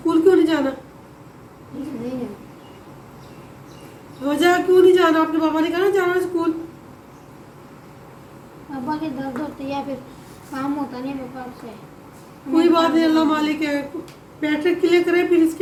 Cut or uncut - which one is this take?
uncut